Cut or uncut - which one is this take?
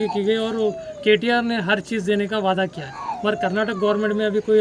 uncut